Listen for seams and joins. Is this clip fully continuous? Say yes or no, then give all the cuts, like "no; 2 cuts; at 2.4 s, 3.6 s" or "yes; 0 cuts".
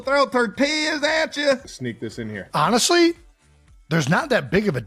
no; 1 cut; at 1.7 s